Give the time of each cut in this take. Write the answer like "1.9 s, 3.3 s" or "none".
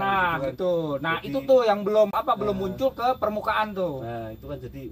2.1 s